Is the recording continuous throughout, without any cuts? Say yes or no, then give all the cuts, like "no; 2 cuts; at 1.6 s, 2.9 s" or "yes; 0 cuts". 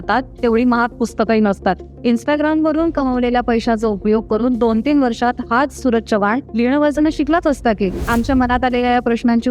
yes; 0 cuts